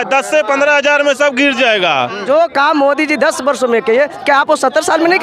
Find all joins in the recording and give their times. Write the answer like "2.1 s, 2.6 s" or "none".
2.2 s